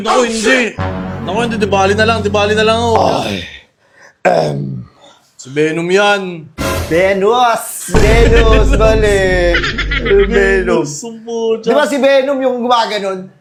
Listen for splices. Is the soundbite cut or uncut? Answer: uncut